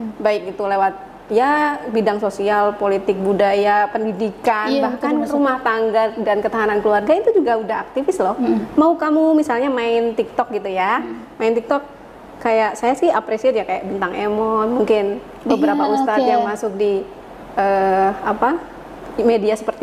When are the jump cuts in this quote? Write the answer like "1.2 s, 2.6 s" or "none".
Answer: none